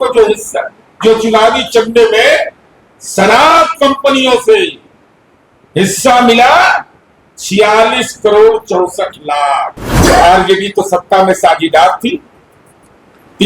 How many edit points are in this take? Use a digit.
1